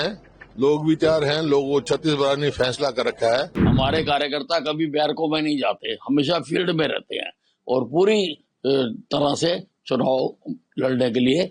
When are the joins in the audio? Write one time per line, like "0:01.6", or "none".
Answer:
0:03.6

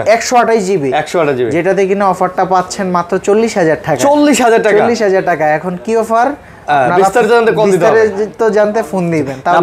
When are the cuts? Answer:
none

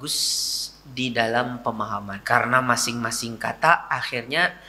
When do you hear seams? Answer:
0:02.1

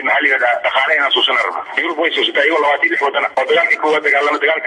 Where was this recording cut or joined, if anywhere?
0:01.7
0:03.3

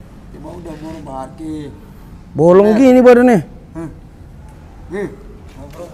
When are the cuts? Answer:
none

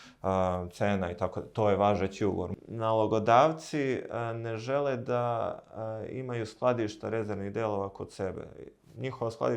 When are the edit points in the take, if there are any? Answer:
0:02.5

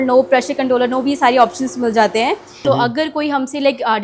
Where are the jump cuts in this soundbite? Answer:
0:02.6

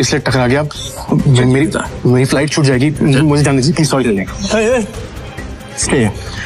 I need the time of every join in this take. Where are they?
none

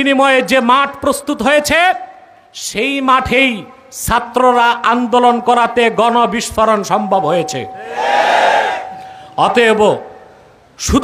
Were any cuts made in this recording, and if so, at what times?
none

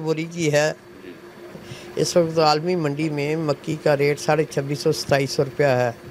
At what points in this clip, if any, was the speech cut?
0:01.5

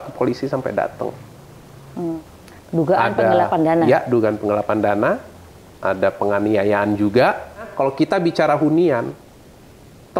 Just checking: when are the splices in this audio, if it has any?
0:02.1
0:07.7

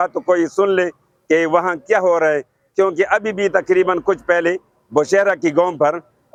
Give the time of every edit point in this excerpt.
none

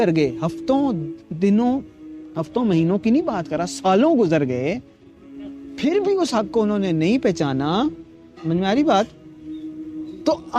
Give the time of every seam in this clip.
none

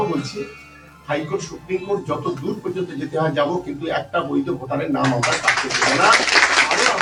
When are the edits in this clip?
none

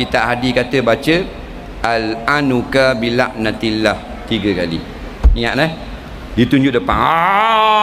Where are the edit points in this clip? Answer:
none

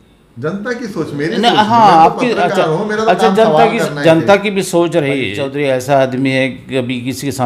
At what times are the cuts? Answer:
0:05.4

